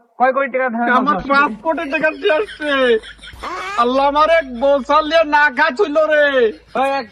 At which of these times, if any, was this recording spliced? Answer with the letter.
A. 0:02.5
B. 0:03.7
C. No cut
C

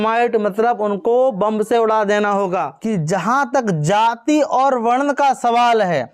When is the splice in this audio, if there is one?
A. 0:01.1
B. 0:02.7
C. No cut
B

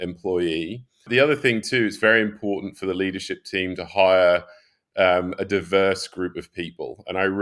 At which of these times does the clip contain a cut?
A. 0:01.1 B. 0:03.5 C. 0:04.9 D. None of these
A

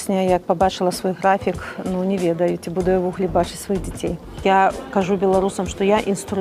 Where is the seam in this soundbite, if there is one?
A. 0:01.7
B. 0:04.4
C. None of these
B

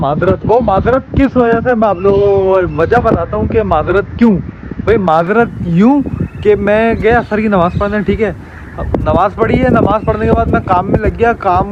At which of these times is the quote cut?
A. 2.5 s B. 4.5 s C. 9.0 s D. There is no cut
D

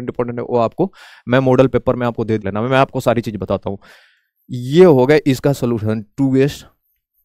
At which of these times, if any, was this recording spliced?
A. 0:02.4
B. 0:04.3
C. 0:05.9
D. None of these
A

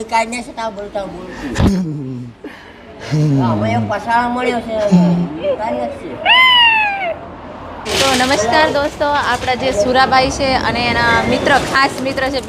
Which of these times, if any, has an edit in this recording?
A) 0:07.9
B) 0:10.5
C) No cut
A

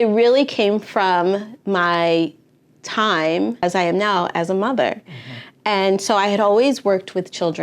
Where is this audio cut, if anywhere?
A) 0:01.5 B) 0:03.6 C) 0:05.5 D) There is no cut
B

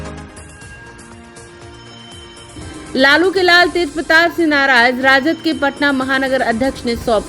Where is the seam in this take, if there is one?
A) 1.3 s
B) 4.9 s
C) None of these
A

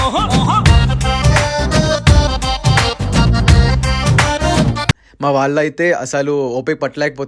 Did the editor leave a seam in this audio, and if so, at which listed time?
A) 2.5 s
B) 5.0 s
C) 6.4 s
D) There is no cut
B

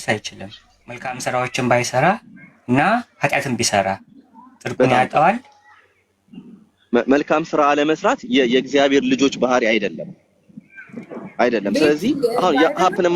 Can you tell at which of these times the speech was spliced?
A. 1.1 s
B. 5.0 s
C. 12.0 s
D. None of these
A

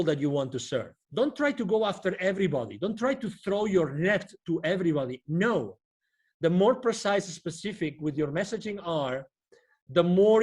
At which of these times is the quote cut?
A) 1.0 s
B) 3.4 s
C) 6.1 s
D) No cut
A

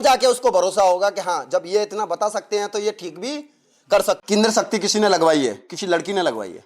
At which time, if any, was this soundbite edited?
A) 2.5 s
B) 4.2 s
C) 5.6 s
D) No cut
B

